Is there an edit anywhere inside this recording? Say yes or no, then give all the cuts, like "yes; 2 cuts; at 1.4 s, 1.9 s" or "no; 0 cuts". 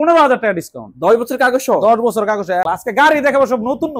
yes; 1 cut; at 2.7 s